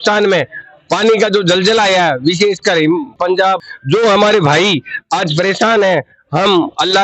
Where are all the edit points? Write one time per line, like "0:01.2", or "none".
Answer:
0:03.3